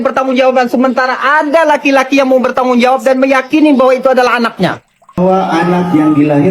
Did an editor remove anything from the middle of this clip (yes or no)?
yes